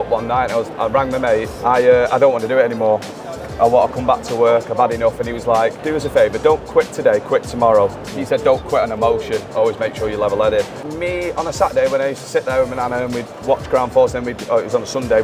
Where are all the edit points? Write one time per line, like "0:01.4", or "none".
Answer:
0:01.5
0:05.8
0:08.1
0:10.9

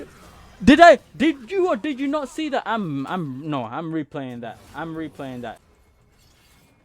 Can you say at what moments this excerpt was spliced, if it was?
0:05.7

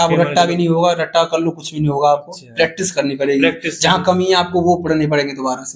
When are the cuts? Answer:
none

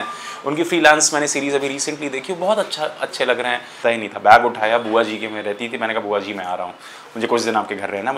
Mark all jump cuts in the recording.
0:03.8

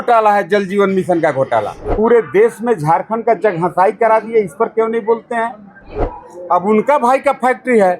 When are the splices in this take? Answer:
0:01.8
0:06.0

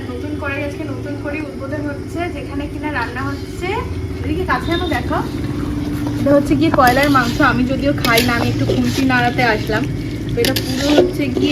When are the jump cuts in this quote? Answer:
none

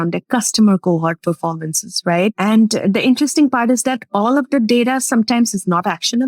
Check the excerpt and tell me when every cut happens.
0:02.4

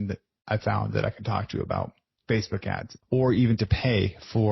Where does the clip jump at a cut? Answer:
0:02.1
0:02.9

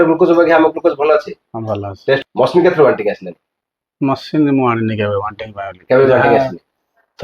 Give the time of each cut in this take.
0:02.2

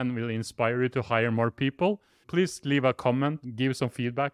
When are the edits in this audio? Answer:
0:02.2
0:03.4

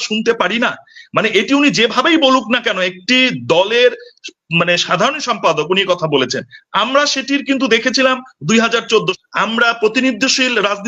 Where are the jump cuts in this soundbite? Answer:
0:09.2

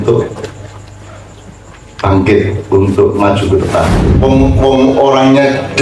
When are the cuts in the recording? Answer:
0:03.9

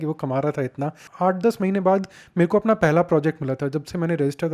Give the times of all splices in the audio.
0:01.0

